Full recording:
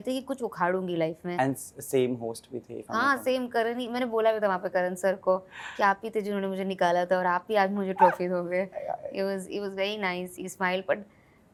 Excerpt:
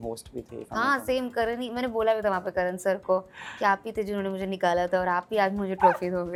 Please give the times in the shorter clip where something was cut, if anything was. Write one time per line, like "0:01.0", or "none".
none